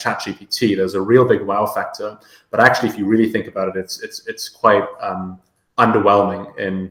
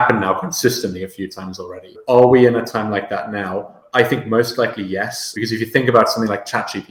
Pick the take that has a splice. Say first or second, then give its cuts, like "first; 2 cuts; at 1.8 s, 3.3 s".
second; 3 cuts; at 1.9 s, 3.8 s, 5.3 s